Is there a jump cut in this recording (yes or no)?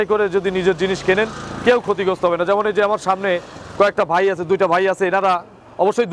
no